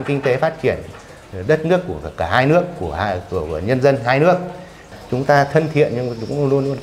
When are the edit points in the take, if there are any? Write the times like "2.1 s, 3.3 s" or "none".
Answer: 4.9 s